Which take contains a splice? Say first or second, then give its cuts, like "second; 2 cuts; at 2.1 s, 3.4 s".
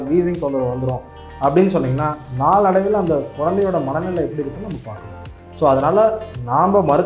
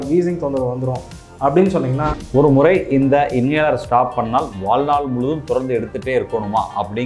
second; 1 cut; at 2.1 s